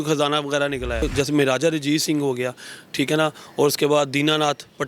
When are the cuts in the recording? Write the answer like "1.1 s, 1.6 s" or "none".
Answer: 1.1 s